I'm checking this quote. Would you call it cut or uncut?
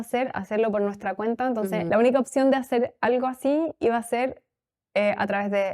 uncut